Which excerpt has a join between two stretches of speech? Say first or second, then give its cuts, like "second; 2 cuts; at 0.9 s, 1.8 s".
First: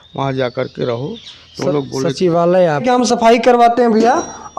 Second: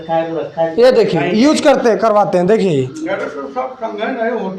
first; 1 cut; at 2.8 s